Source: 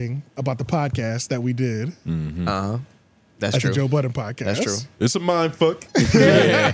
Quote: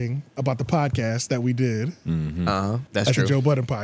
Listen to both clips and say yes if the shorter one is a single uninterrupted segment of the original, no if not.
no